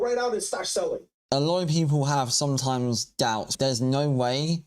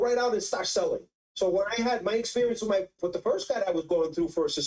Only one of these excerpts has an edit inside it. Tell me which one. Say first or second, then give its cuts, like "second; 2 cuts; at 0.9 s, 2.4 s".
first; 1 cut; at 1.1 s